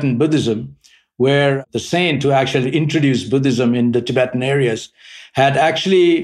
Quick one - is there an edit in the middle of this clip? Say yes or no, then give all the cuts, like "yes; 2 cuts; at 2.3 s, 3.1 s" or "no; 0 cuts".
yes; 1 cut; at 1.6 s